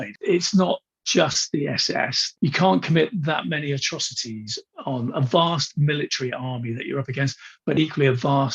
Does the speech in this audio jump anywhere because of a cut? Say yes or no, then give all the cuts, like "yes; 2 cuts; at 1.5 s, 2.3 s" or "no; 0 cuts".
yes; 1 cut; at 4.7 s